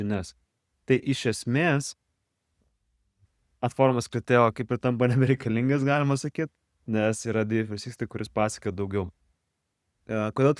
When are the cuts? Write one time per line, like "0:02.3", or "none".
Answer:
none

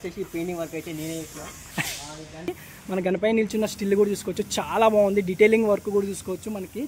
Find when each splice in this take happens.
0:02.5

